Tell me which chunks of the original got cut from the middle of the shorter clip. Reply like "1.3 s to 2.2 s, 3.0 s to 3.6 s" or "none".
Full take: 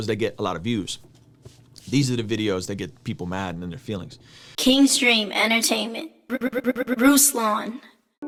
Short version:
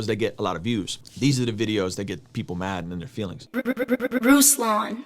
1.0 s to 1.7 s, 4.1 s to 6.2 s

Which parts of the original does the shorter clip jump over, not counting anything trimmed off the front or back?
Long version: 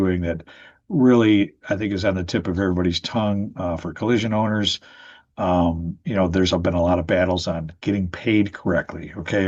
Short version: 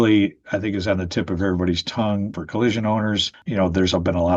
3.5 s to 3.8 s, 4.8 s to 5.9 s

